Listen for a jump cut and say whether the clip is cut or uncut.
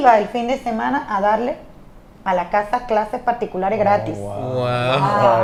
uncut